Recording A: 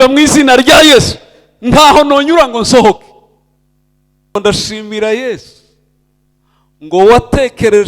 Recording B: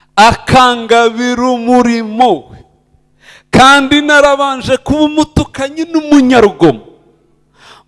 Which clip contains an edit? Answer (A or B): A